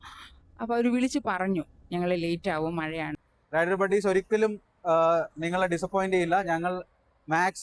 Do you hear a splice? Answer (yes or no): yes